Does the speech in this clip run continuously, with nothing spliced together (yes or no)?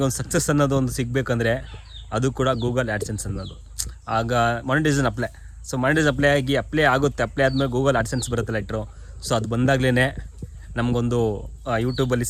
yes